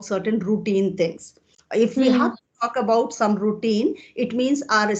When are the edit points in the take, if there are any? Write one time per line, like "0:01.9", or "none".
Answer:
none